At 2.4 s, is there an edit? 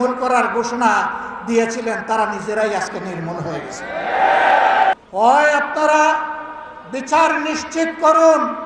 no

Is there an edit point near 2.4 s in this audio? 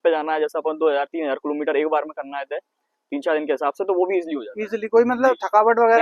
no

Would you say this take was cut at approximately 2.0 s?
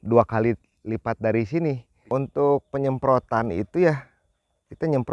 yes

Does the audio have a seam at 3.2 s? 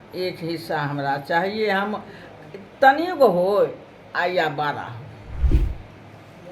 no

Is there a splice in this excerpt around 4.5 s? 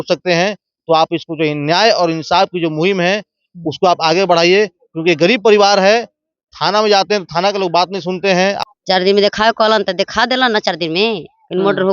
no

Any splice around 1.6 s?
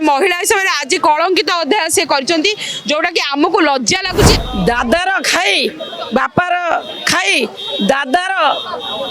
no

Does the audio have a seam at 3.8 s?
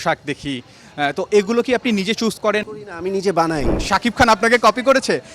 yes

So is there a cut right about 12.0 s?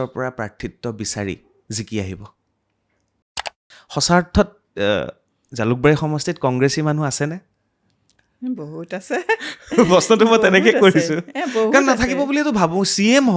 no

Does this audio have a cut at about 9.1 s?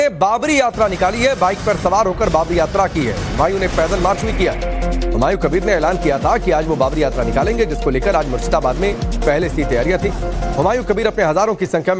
no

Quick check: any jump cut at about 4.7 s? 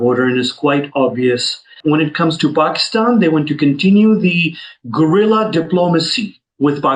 no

